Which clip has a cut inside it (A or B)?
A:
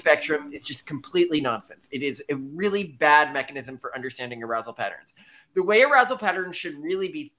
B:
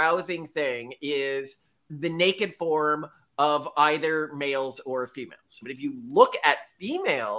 B